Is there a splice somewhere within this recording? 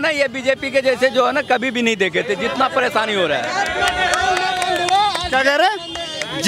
no; 0 cuts

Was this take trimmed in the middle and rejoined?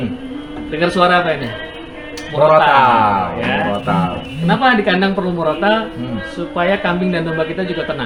no; 0 cuts

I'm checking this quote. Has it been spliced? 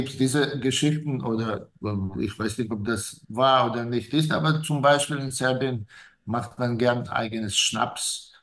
no; 0 cuts

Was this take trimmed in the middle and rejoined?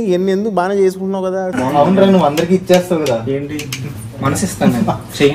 yes; 1 cut; at 1.5 s

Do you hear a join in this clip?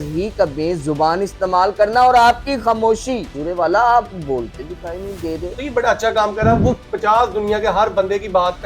yes; 2 cuts; at 3.4 s, 5.5 s

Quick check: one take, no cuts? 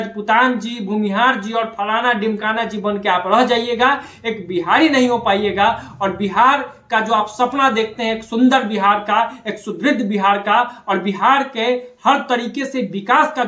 yes; 0 cuts

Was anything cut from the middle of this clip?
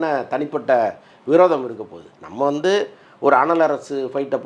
no; 0 cuts

